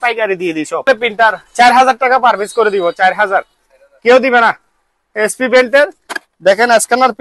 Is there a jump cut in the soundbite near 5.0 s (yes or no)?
yes